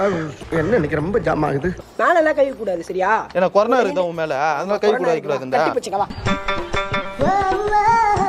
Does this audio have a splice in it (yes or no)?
yes